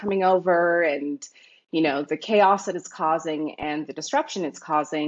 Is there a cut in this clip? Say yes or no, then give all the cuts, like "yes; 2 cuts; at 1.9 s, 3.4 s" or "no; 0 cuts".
no; 0 cuts